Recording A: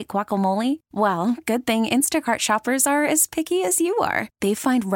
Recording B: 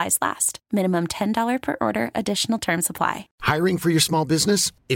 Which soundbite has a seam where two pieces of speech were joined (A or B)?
B